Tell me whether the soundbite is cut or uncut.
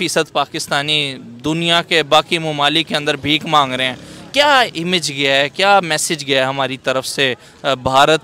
uncut